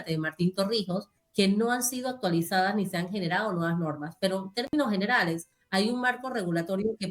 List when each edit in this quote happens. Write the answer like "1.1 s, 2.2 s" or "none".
1.2 s, 5.5 s